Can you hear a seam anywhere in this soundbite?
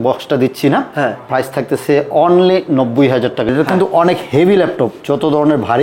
yes; 1 cut; at 3.5 s

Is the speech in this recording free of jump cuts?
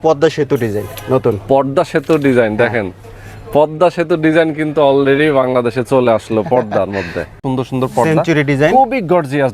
no; 1 cut; at 7.4 s

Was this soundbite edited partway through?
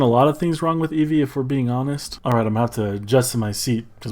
yes; 1 cut; at 2.2 s

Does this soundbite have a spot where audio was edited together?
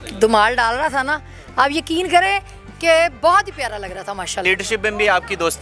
yes; 1 cut; at 4.4 s

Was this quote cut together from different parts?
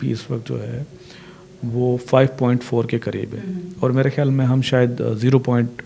no; 0 cuts

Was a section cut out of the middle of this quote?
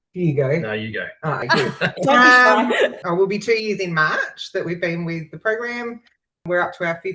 no; 0 cuts

